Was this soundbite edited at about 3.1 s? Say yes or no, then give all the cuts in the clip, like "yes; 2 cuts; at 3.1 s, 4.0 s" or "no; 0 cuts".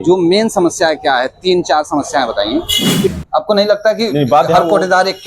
yes; 1 cut; at 3.1 s